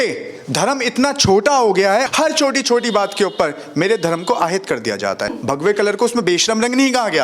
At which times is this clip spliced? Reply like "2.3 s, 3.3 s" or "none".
2.1 s, 5.4 s